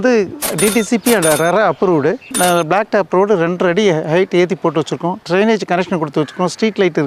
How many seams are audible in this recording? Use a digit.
1